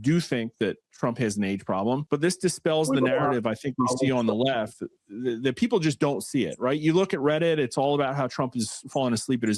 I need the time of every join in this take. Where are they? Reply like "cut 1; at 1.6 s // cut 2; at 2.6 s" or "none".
cut 1; at 2.0 s

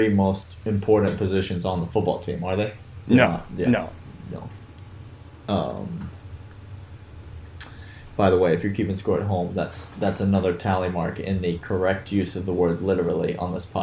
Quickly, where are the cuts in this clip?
none

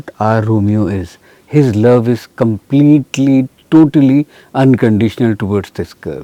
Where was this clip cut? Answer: none

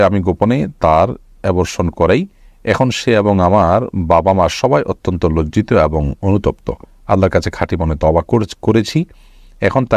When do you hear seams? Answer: none

